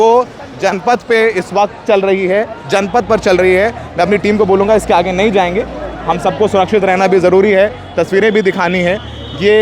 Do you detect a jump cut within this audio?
no; 0 cuts

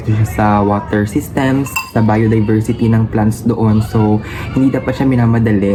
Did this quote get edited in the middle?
no; 0 cuts

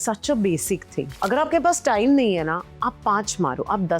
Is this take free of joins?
no; 1 cut; at 1.1 s

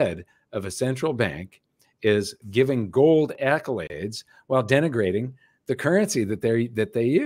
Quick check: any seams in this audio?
yes; 2 cuts; at 2.4 s, 3.4 s

